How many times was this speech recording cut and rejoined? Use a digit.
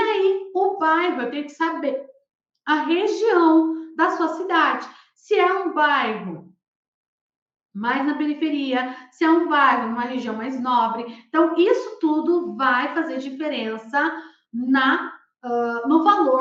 0